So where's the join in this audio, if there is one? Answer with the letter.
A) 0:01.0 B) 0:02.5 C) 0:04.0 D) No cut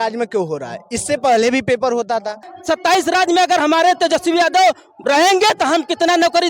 B